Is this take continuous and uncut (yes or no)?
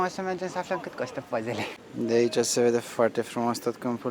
yes